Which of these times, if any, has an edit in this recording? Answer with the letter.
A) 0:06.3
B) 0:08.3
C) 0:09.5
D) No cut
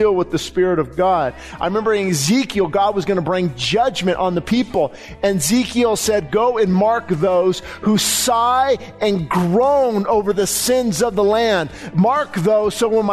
A